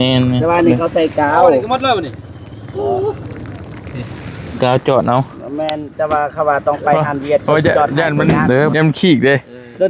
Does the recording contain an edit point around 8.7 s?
yes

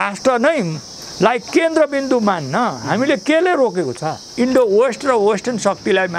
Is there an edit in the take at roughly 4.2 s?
yes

